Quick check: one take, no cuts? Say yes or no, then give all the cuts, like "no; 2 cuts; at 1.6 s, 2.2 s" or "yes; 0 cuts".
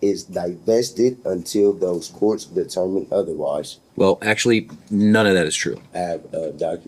no; 2 cuts; at 3.8 s, 5.8 s